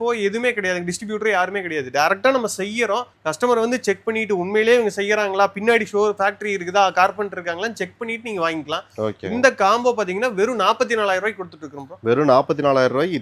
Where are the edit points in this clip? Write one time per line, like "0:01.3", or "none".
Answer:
none

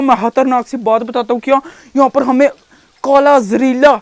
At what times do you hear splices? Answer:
none

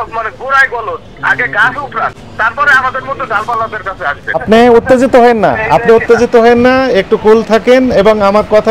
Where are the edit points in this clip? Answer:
0:04.4

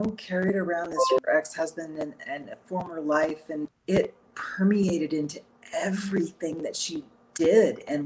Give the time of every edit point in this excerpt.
0:01.2
0:03.8

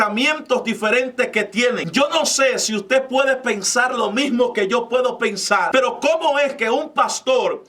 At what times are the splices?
0:01.8
0:05.7

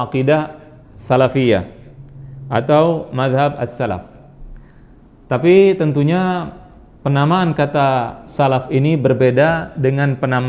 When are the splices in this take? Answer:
none

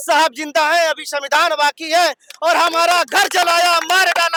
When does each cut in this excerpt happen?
none

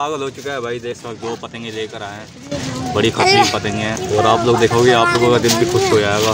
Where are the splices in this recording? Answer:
0:00.9
0:04.0

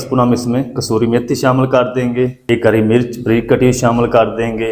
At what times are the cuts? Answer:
0:02.4

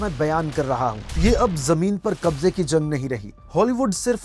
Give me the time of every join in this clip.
0:01.1
0:03.4

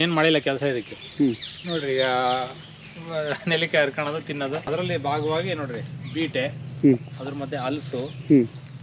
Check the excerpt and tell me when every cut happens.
0:04.7

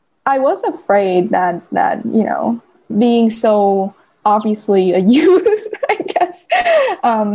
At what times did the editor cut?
0:02.9
0:04.1

